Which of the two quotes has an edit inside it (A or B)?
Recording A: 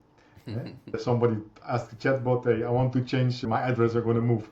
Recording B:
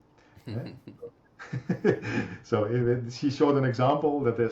A